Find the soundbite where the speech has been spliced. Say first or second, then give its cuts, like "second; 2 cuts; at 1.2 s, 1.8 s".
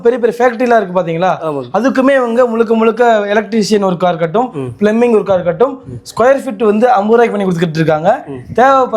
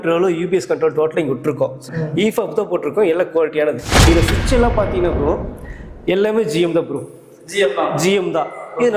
second; 2 cuts; at 1.8 s, 3.9 s